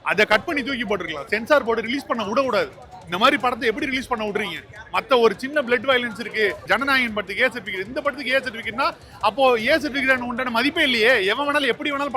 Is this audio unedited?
no; 1 cut; at 6.6 s

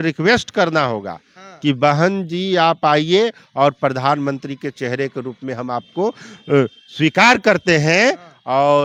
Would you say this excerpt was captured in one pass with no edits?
yes; 0 cuts

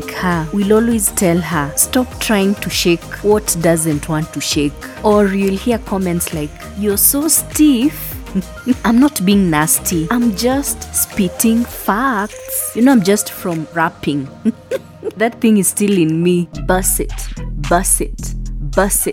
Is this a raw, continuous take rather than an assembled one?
yes; 0 cuts

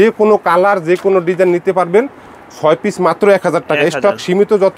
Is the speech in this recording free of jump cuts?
yes; 0 cuts

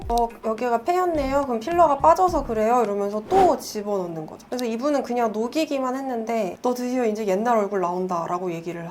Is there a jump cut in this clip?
yes; 2 cuts; at 4.3 s, 6.5 s

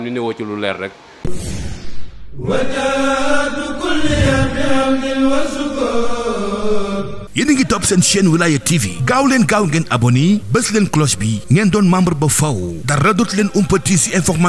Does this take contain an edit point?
yes; 1 cut; at 1.1 s

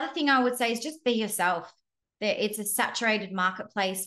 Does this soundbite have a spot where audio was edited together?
no; 0 cuts

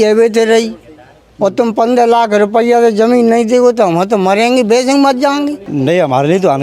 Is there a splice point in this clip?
yes; 1 cut; at 5.6 s

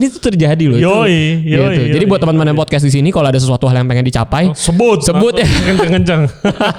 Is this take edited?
no; 0 cuts

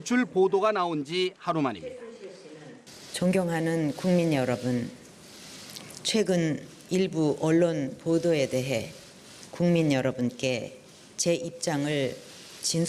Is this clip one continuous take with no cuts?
yes; 0 cuts

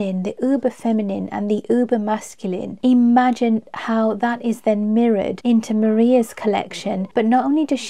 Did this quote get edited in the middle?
yes; 1 cut; at 2.7 s

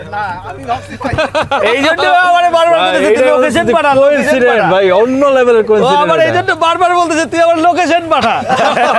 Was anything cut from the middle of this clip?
no; 0 cuts

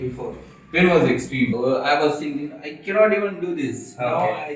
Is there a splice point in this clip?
yes; 1 cut; at 1.5 s

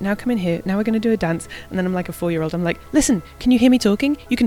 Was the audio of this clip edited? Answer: no; 0 cuts

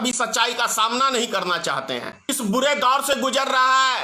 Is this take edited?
yes; 1 cut; at 2.2 s

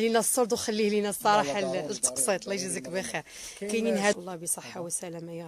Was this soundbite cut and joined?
yes; 1 cut; at 4.2 s

